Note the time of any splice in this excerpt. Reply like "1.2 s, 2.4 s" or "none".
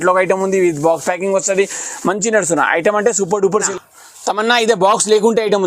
3.7 s